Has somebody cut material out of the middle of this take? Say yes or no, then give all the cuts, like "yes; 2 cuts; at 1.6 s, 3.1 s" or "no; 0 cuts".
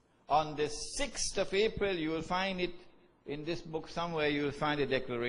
yes; 1 cut; at 1.2 s